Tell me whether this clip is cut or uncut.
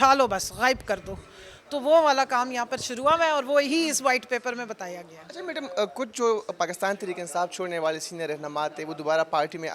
uncut